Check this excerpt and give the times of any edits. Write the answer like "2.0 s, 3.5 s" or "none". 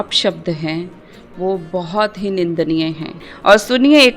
3.3 s